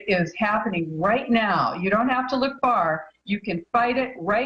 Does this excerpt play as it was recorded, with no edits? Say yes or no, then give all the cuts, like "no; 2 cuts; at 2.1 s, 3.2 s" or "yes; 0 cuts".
yes; 0 cuts